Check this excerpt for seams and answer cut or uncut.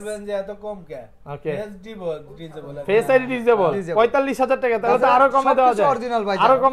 uncut